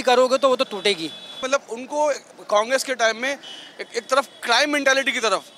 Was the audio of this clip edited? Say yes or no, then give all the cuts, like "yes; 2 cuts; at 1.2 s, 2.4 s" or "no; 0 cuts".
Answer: yes; 1 cut; at 1.4 s